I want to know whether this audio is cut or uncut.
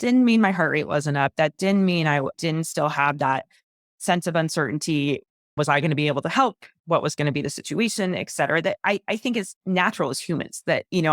cut